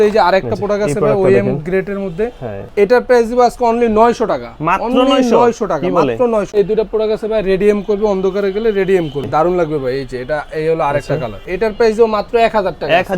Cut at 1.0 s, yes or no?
no